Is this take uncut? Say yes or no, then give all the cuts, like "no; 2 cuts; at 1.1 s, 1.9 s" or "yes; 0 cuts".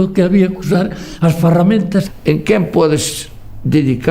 no; 1 cut; at 2.1 s